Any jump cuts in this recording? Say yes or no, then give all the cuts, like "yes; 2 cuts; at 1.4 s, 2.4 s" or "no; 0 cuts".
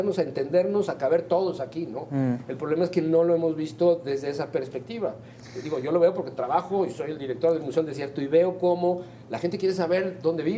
no; 0 cuts